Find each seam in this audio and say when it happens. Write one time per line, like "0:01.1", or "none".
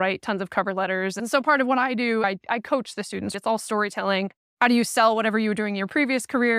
0:01.2
0:02.2
0:03.3

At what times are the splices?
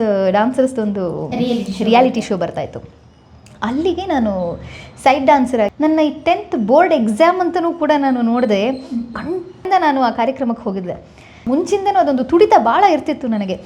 0:05.7
0:09.6
0:11.4

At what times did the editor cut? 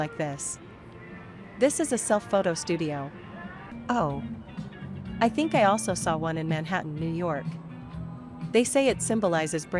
0:01.5
0:03.1

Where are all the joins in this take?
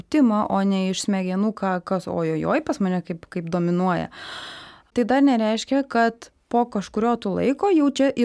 0:04.9

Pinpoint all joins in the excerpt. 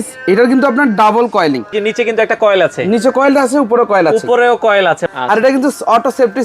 0:01.7
0:05.1

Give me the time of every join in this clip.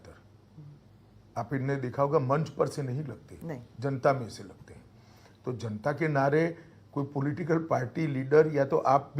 none

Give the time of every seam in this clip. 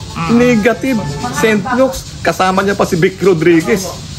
none

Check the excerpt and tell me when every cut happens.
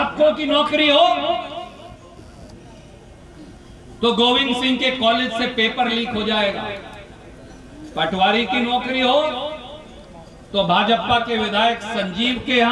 none

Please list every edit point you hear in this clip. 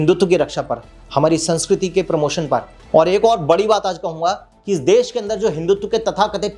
0:02.8

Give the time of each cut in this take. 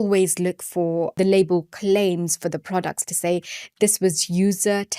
0:01.1

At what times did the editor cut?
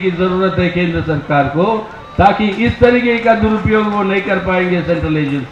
none

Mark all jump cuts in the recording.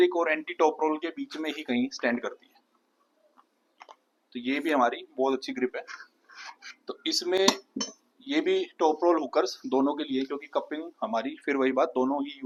none

